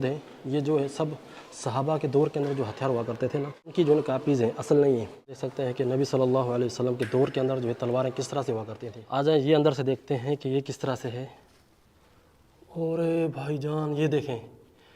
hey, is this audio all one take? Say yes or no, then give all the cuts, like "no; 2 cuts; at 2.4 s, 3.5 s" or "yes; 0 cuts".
no; 3 cuts; at 3.6 s, 5.4 s, 9.1 s